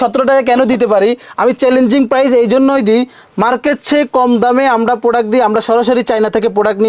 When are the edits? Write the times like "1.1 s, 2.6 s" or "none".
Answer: none